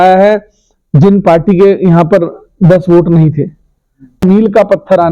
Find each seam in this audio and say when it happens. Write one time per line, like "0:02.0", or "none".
0:04.2